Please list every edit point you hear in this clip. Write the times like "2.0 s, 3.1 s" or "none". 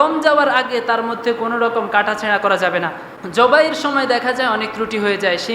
3.1 s